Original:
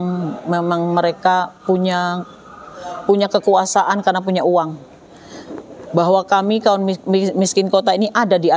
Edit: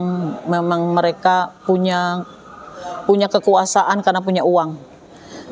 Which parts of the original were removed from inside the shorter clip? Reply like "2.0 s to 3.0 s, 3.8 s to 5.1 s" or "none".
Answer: none